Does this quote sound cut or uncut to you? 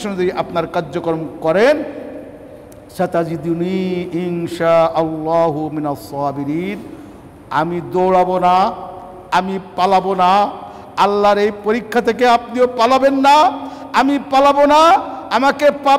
uncut